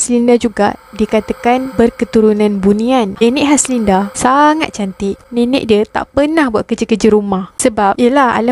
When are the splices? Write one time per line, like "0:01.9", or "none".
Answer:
0:03.1
0:05.2
0:07.5